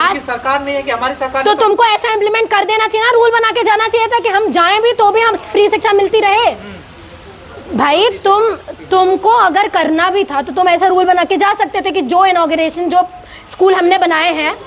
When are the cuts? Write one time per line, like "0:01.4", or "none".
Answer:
none